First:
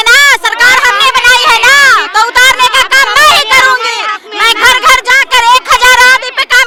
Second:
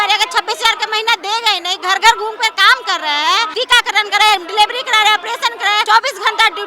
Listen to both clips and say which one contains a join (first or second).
second